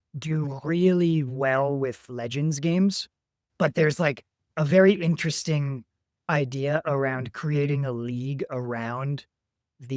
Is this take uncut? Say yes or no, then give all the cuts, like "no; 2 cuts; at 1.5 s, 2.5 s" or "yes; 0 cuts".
no; 1 cut; at 3.4 s